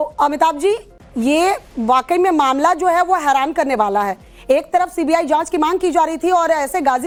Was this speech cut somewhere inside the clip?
no; 0 cuts

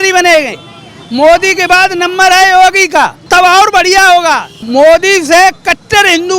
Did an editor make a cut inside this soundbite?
yes; 2 cuts; at 3.2 s, 4.5 s

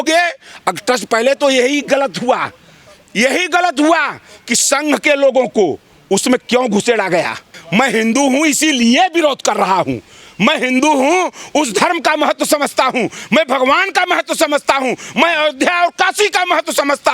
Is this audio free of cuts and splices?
no; 1 cut; at 7.5 s

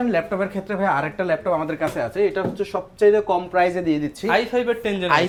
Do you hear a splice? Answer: no; 0 cuts

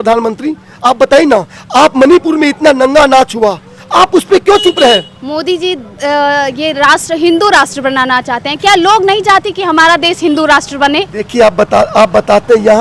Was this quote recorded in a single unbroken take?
yes; 0 cuts

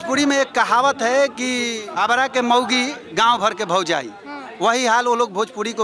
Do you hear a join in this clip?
yes; 1 cut; at 1.8 s

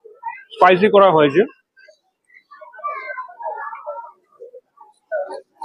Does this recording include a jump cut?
no; 0 cuts

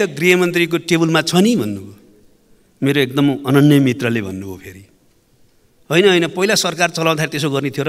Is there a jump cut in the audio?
no; 0 cuts

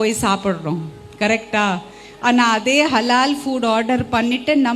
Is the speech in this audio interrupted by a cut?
no; 0 cuts

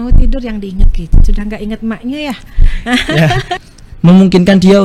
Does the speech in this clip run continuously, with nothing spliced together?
no; 1 cut; at 3.6 s

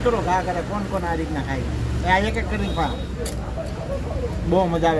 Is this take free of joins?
yes; 0 cuts

